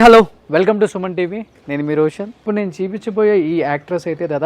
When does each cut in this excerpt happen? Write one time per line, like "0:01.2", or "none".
0:02.3